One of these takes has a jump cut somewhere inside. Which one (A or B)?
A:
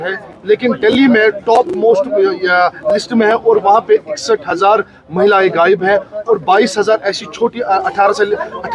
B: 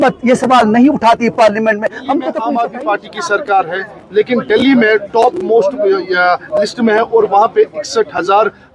B